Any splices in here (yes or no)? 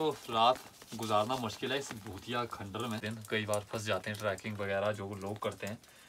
yes